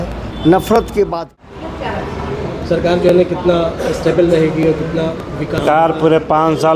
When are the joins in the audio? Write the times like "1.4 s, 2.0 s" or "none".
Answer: 1.2 s